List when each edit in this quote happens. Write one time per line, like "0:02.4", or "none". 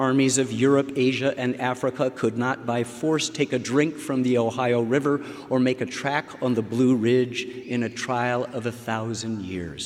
none